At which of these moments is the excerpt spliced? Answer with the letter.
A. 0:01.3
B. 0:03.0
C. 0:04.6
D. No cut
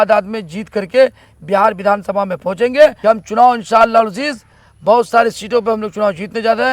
B